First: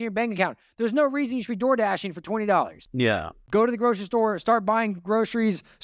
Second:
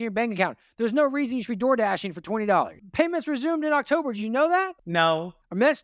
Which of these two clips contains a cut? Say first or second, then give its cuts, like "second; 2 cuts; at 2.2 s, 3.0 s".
second; 2 cuts; at 2.8 s, 4.8 s